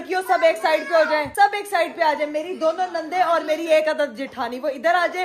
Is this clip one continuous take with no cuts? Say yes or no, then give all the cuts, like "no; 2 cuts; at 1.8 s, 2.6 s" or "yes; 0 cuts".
yes; 0 cuts